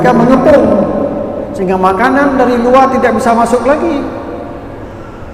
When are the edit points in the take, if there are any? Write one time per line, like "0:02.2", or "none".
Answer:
none